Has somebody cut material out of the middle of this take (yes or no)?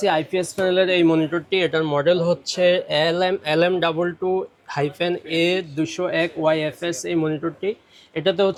no